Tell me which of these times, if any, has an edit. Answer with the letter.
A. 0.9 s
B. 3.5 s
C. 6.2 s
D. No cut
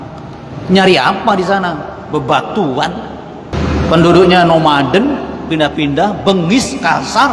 B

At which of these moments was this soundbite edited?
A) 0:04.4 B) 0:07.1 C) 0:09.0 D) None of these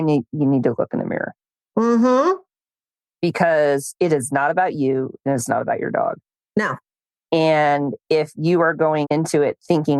C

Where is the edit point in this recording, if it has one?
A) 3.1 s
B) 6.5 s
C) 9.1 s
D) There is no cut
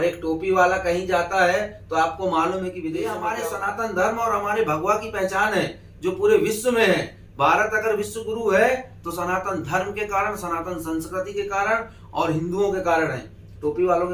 A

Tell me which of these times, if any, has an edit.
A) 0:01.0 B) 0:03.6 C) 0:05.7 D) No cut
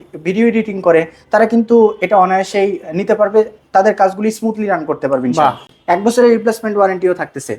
D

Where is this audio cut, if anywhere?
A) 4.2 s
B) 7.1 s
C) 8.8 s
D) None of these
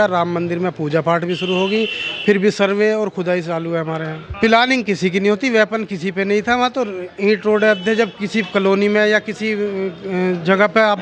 A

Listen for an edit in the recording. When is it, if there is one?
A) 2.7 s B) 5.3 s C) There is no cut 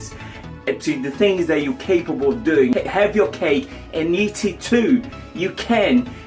A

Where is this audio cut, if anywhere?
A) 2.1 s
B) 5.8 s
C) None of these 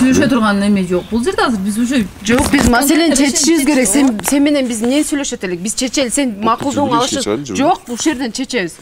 C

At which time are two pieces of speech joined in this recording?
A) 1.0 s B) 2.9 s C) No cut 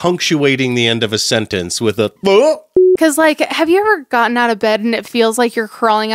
B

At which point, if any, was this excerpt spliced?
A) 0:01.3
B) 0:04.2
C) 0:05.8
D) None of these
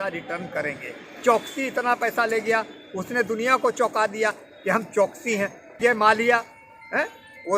C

